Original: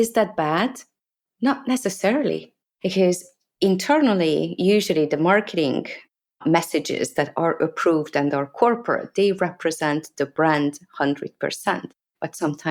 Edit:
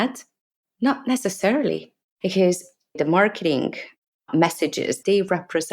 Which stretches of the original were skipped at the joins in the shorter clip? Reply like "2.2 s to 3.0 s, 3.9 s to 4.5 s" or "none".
3.6 s to 5.1 s, 7.1 s to 9.1 s